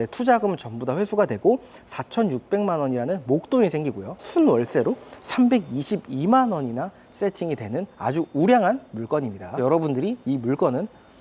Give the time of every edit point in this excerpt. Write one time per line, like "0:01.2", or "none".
0:09.5